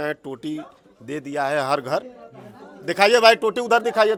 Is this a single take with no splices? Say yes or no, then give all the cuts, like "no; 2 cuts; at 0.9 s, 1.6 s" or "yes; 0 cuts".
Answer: yes; 0 cuts